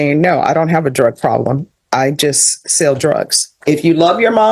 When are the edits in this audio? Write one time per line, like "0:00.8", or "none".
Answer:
0:03.6